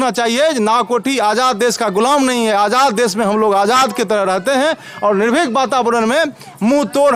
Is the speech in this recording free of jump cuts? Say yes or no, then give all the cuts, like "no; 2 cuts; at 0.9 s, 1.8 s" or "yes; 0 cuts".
yes; 0 cuts